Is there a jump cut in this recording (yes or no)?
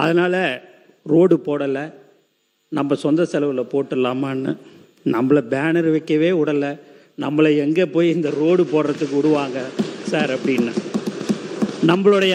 no